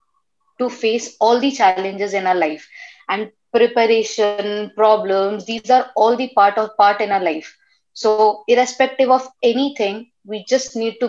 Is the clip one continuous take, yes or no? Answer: yes